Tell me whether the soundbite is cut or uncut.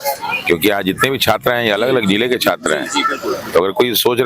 uncut